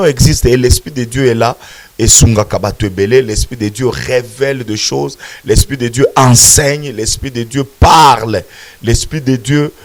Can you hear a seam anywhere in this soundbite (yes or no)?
no